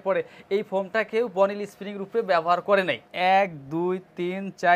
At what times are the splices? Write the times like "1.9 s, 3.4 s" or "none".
3.1 s